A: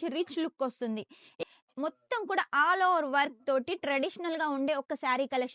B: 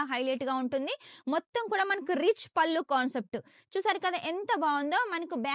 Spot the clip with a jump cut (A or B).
A